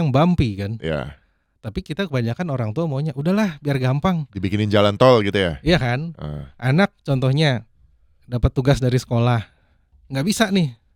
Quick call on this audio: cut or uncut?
uncut